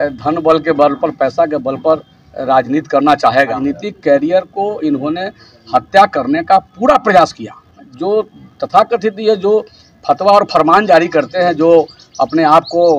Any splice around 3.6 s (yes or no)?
yes